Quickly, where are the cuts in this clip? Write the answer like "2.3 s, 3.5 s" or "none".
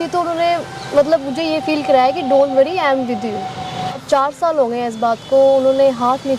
3.9 s